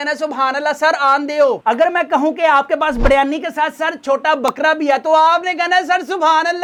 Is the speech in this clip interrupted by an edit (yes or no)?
no